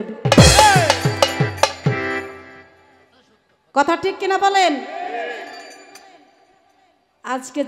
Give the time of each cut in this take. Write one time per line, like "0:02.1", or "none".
none